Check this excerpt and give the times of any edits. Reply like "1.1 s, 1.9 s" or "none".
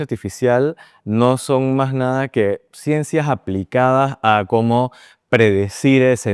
none